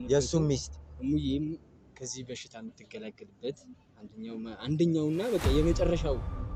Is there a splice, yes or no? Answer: no